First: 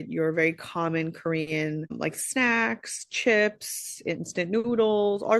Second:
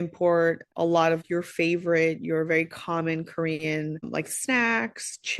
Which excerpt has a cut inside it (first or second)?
second